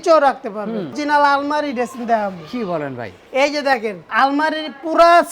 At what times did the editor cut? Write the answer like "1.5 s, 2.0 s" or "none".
1.0 s, 4.0 s